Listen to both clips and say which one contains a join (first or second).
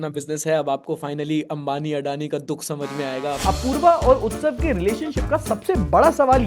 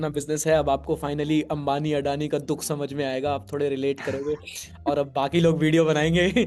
first